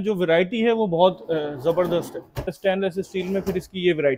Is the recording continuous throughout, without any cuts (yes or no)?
no